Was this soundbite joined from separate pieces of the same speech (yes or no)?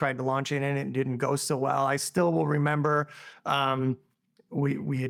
no